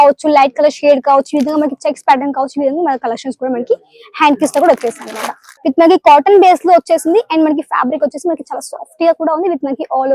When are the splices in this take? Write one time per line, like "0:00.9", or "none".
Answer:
0:05.4